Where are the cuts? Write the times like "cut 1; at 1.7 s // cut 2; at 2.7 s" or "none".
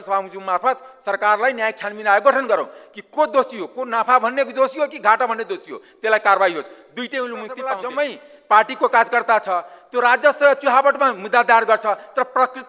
cut 1; at 7.7 s